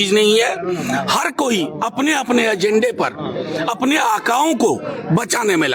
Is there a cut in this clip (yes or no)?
no